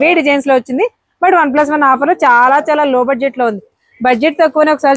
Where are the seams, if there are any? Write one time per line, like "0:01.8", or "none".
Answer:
none